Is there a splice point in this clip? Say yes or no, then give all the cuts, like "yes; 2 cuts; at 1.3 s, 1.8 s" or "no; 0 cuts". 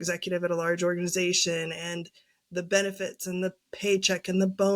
no; 0 cuts